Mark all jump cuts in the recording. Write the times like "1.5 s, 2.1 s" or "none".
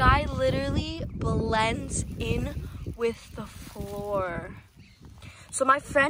none

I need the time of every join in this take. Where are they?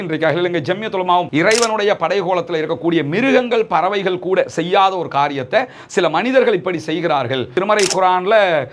1.3 s, 7.5 s

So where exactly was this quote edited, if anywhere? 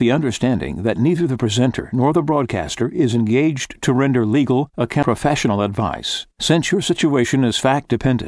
5.0 s

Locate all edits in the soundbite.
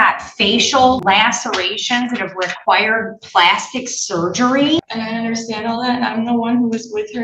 1.0 s, 4.9 s

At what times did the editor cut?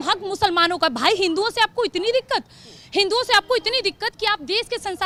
none

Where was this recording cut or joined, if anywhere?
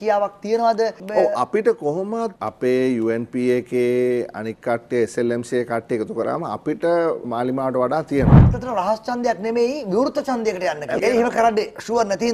2.4 s, 7.2 s, 8.4 s, 11.0 s

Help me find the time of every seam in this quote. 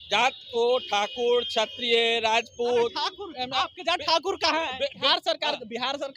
5.0 s

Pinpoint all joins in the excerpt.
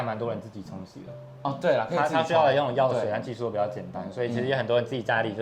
none

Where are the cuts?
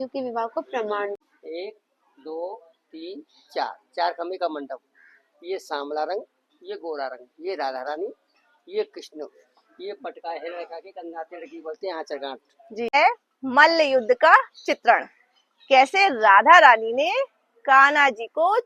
1.2 s, 12.9 s

